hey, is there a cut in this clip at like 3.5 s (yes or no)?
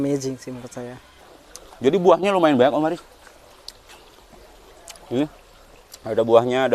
no